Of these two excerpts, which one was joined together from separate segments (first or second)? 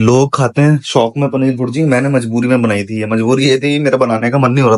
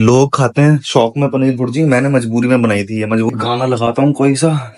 second